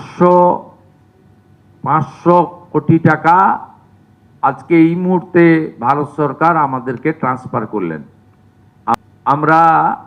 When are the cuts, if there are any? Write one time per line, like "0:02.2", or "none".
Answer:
0:09.0